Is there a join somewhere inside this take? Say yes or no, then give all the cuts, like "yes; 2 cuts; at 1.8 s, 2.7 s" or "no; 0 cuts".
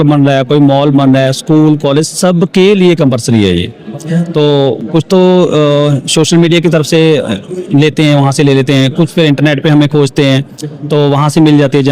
no; 0 cuts